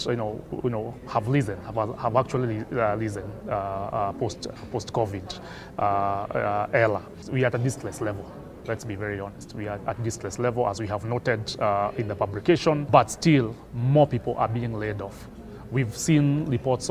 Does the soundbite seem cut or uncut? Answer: cut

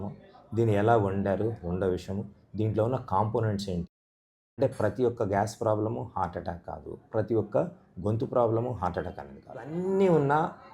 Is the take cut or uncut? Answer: cut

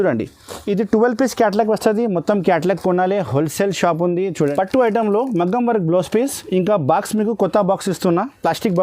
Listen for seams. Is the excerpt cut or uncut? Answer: cut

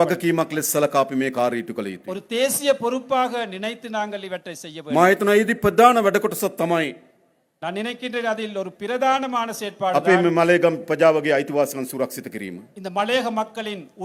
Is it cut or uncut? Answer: uncut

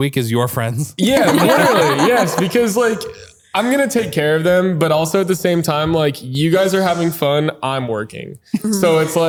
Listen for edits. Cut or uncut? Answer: uncut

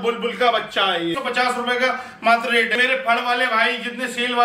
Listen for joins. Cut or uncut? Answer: cut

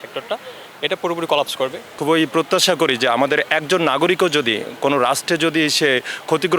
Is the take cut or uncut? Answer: cut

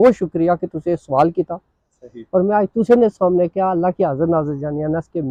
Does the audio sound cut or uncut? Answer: uncut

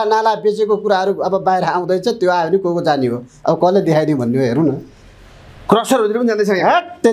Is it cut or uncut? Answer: uncut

